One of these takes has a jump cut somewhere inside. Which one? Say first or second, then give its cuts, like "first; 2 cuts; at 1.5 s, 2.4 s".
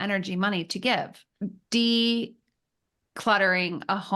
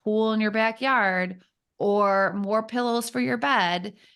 first; 1 cut; at 1.2 s